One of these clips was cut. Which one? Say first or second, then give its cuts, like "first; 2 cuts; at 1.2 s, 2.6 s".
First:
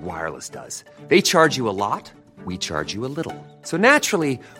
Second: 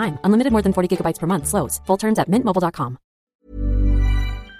second; 1 cut; at 3.3 s